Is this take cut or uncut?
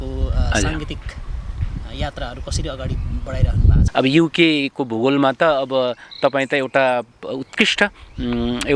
cut